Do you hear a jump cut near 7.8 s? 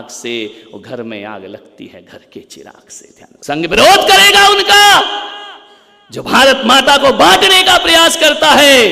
no; 1 cut; at 3.3 s

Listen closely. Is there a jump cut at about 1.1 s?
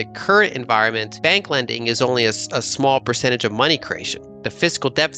yes; 1 cut; at 1.1 s

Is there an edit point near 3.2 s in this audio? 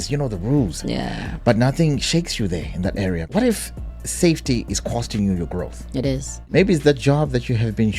yes; 2 cuts; at 3.2 s, 6.5 s

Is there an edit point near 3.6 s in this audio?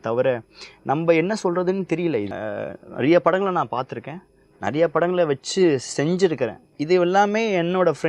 no; 1 cut; at 2.3 s

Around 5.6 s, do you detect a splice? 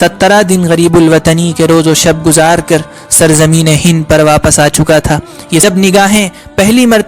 yes; 1 cut; at 5.6 s

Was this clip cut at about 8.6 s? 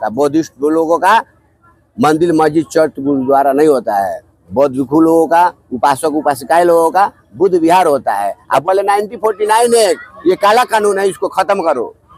yes; 1 cut; at 8.6 s

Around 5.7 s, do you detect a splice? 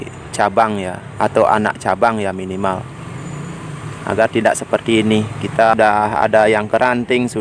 yes; 1 cut; at 5.7 s

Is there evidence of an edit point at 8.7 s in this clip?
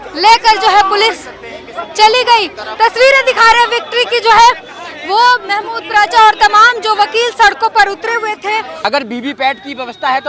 yes; 1 cut; at 8.7 s

